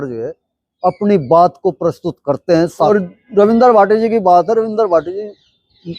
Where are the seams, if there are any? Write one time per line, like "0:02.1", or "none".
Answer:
0:02.9